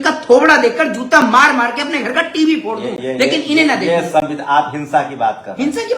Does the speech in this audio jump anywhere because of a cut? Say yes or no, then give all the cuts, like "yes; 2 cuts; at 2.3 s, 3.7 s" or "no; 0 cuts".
no; 0 cuts